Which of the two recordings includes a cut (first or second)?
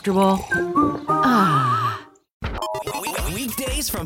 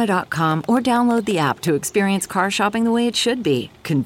first